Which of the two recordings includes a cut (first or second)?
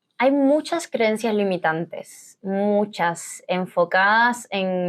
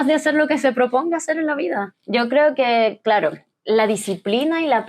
second